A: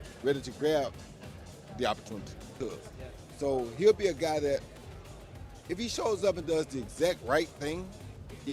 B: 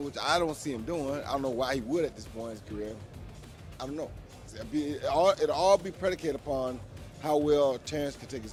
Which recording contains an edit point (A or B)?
A